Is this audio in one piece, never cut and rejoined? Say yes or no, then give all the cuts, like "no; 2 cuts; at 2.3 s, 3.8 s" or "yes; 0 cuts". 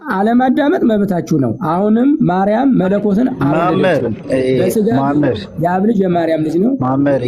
yes; 0 cuts